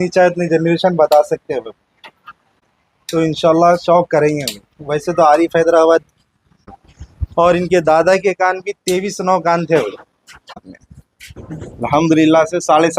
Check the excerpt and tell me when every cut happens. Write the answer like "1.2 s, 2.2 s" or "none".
2.6 s, 6.7 s, 10.8 s